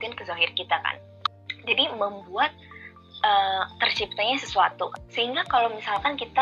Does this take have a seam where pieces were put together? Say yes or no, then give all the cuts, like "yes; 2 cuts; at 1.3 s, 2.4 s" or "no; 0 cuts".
yes; 2 cuts; at 1.1 s, 5.0 s